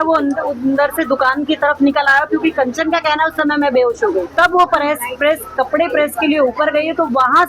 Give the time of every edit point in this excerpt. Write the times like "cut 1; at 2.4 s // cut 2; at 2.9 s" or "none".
cut 1; at 4.3 s